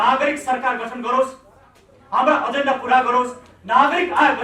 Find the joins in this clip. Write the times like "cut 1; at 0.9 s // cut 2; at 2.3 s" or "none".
none